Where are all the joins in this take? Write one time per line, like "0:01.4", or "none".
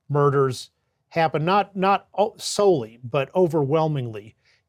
none